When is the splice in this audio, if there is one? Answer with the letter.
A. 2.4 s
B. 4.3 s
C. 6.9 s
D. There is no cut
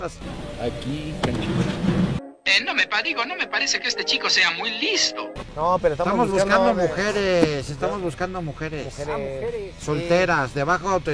D